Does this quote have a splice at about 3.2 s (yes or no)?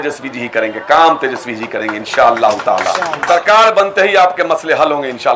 yes